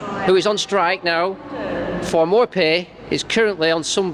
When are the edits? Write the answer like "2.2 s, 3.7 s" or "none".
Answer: none

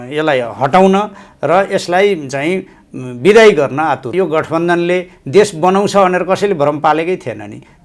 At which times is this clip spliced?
4.1 s

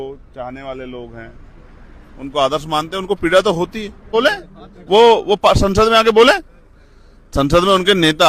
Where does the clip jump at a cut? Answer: 4.1 s

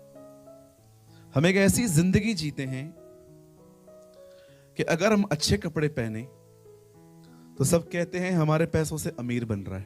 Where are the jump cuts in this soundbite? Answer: 1.3 s, 2.9 s, 4.7 s

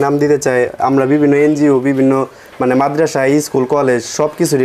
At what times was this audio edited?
none

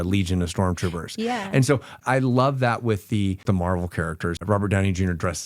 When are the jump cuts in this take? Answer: 2.0 s, 3.4 s, 4.4 s

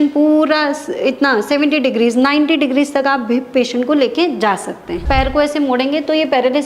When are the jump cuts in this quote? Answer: 5.0 s

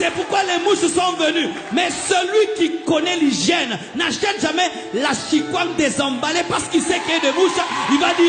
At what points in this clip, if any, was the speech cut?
none

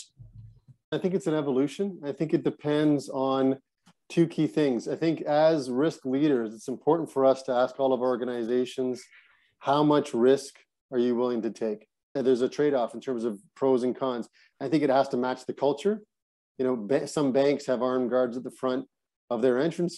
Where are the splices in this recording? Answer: 0.9 s, 12.1 s

